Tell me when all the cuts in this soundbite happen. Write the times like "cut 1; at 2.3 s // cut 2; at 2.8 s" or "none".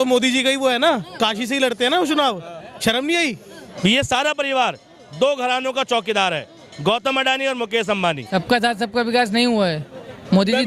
cut 1; at 3.6 s // cut 2; at 8.2 s